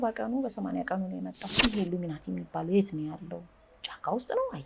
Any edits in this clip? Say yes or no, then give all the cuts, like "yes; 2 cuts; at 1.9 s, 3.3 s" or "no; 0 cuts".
yes; 1 cut; at 1.4 s